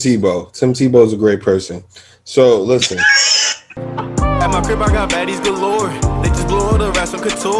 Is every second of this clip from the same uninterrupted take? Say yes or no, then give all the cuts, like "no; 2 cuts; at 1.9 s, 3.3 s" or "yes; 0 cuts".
no; 1 cut; at 3.8 s